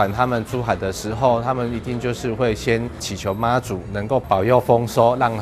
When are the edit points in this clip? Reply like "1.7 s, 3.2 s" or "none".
3.1 s, 4.2 s